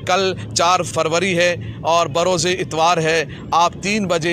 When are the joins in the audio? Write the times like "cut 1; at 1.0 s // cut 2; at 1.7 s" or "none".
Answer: cut 1; at 0.9 s